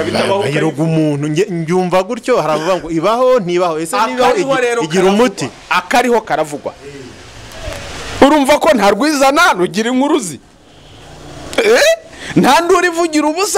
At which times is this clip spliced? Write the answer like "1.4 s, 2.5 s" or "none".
none